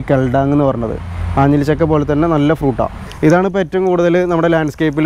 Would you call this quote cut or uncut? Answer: cut